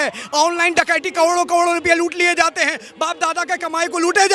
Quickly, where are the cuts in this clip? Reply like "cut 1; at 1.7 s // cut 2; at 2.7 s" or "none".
none